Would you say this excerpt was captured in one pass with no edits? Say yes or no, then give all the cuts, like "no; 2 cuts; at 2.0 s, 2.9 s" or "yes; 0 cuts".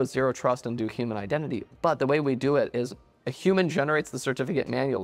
yes; 0 cuts